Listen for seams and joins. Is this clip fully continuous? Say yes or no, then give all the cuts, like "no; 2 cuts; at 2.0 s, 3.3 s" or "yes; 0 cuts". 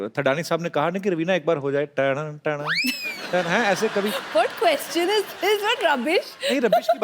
yes; 0 cuts